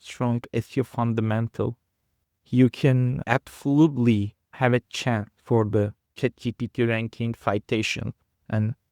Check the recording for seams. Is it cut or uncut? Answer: cut